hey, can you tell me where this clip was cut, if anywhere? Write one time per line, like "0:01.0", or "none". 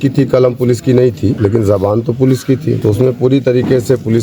0:01.4
0:02.8